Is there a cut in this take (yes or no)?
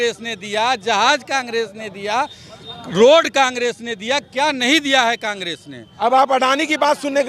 yes